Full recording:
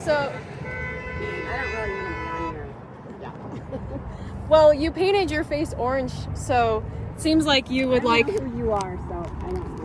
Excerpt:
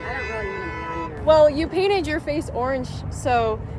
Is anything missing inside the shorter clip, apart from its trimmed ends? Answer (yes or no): yes